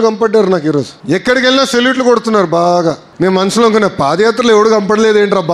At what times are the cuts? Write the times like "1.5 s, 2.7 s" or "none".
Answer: 1.0 s, 3.1 s